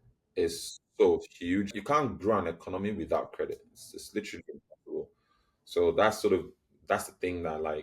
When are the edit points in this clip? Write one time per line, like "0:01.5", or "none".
0:01.7